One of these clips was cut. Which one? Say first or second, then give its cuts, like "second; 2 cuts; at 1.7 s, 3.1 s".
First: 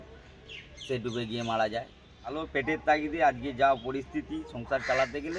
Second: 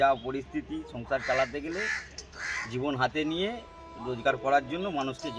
first; 1 cut; at 2.4 s